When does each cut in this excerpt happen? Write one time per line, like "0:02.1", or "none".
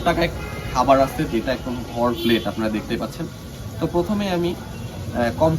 none